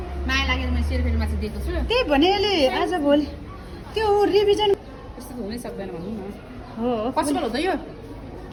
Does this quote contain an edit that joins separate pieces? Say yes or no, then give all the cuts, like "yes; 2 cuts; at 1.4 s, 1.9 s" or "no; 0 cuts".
no; 0 cuts